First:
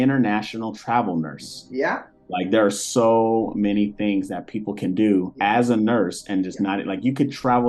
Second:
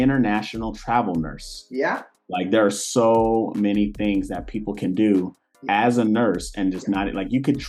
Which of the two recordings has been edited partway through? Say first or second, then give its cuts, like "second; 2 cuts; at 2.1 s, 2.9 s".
first; 1 cut; at 5.3 s